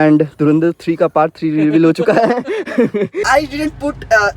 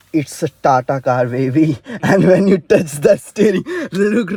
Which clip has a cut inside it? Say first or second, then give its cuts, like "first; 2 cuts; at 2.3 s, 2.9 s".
first; 1 cut; at 3.2 s